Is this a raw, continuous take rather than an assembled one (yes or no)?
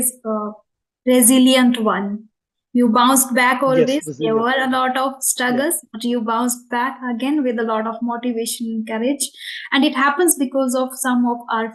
yes